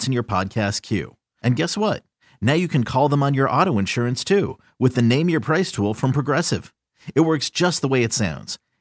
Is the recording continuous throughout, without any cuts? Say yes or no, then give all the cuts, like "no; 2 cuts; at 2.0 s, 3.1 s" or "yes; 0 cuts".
yes; 0 cuts